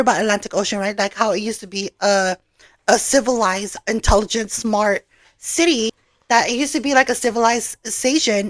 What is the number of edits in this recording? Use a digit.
1